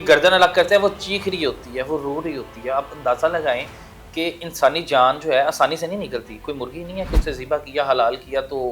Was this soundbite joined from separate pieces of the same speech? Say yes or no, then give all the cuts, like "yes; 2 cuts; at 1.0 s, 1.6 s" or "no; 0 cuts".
no; 0 cuts